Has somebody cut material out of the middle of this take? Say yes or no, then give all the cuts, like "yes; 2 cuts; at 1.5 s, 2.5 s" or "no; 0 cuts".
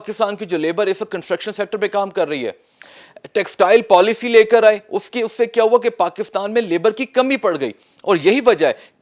no; 0 cuts